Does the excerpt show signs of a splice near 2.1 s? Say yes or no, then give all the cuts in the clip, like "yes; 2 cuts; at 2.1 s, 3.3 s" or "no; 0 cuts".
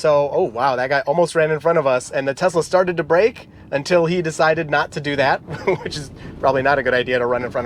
no; 0 cuts